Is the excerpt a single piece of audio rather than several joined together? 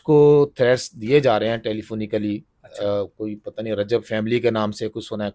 yes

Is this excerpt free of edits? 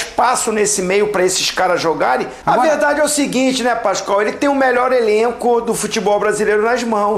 no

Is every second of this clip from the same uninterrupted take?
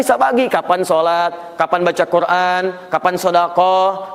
yes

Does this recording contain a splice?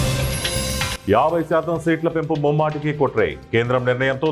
no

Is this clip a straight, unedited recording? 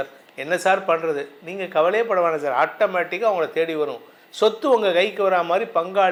yes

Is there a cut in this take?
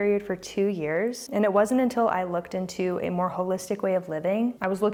no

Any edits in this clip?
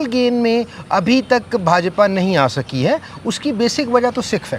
no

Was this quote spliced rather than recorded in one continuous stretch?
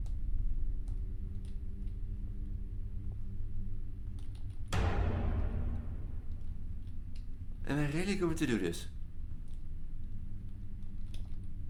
no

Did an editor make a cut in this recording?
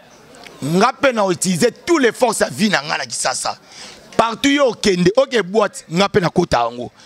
no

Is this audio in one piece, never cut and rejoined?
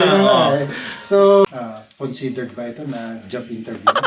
no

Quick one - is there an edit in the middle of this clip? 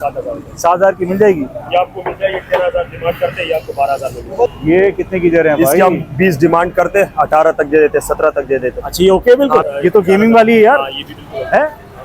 yes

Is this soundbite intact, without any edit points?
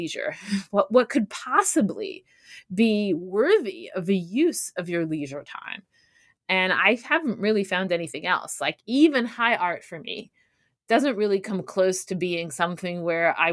yes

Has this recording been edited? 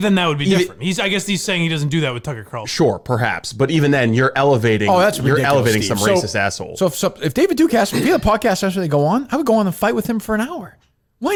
no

